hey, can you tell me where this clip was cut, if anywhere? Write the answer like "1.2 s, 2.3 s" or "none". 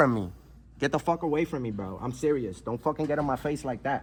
none